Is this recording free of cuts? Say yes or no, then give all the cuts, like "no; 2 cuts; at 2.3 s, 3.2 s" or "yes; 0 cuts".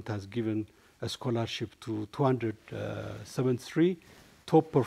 yes; 0 cuts